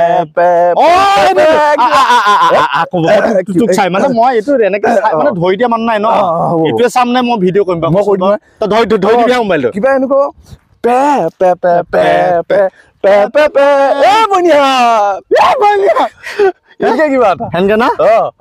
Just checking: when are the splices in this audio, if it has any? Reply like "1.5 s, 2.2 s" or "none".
none